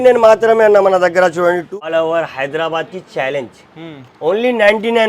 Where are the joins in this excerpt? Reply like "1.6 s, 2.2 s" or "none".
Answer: 1.7 s